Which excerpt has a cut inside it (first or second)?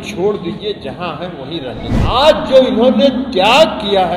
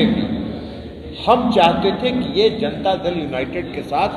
first